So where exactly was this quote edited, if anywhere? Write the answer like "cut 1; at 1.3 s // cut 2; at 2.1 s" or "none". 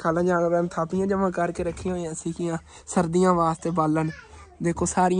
none